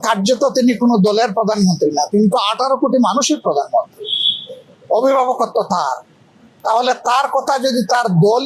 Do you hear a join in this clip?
no; 0 cuts

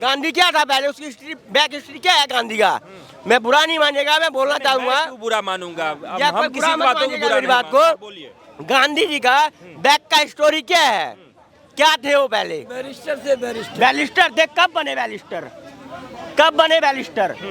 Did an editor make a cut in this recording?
no; 0 cuts

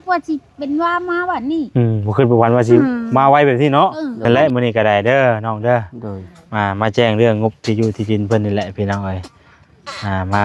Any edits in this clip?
yes; 1 cut; at 4.2 s

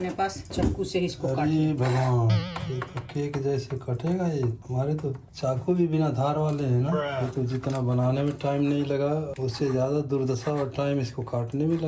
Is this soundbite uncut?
no; 2 cuts; at 2.6 s, 7.2 s

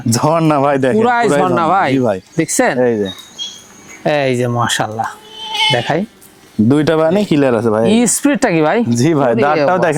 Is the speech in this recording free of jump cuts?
yes; 0 cuts

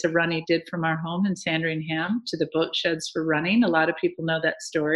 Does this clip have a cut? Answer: no; 0 cuts

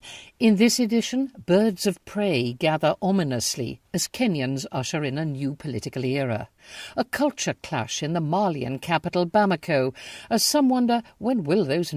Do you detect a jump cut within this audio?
no; 0 cuts

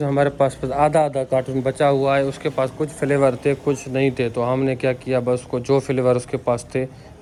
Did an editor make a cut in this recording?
no; 0 cuts

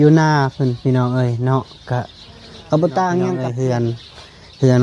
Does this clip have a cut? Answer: yes; 1 cut; at 3.5 s

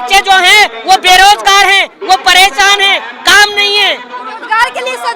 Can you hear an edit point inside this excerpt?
no; 0 cuts

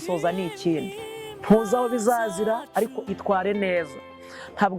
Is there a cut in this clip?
no; 0 cuts

